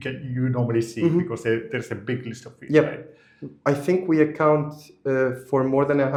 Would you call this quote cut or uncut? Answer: uncut